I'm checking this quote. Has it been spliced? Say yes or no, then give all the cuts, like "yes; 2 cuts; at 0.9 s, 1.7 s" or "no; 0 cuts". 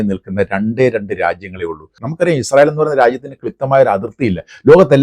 yes; 1 cut; at 2.0 s